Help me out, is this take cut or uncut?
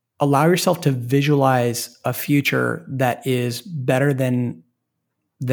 uncut